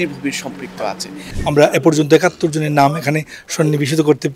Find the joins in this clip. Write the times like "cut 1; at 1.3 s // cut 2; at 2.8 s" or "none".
cut 1; at 1.2 s